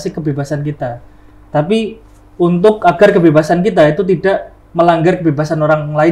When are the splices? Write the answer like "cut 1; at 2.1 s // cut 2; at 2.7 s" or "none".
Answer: none